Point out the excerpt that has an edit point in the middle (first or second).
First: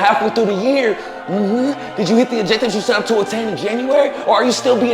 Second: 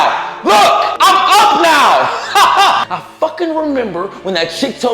second